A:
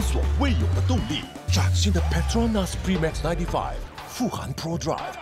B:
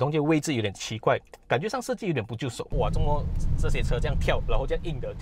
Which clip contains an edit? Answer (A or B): B